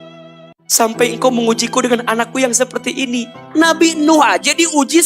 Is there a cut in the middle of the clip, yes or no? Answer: yes